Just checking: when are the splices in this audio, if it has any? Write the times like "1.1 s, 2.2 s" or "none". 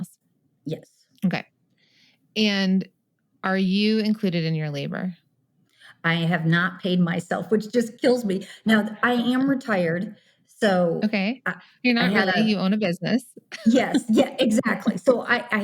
none